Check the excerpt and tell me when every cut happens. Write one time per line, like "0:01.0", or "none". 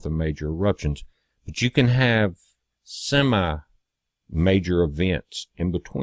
0:04.8